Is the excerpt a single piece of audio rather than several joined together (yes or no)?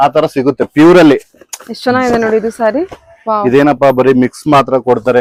yes